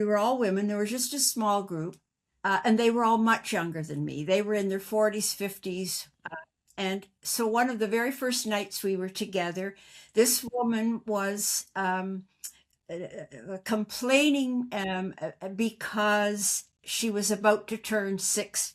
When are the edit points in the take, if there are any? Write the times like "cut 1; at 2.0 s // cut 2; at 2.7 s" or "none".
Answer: none